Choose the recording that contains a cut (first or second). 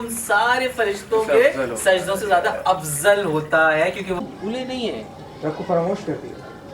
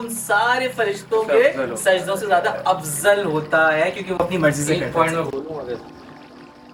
first